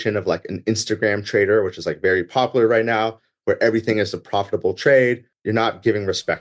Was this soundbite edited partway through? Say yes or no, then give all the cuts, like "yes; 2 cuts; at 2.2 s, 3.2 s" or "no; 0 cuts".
yes; 1 cut; at 5.3 s